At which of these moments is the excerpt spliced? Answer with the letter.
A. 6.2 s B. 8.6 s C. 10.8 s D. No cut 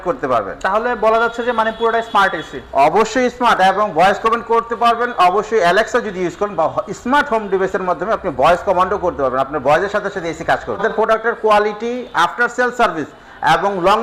C